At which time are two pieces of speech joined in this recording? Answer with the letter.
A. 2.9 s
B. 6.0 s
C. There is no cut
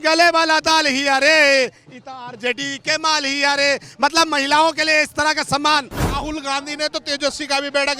B